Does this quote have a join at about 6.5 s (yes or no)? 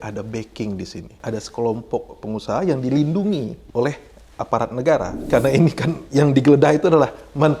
no